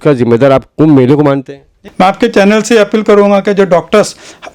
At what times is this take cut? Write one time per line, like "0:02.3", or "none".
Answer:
0:01.8